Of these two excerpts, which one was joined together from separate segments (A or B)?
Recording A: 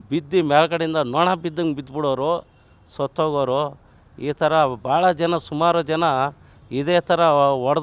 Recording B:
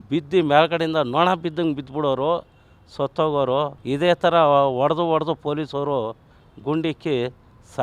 B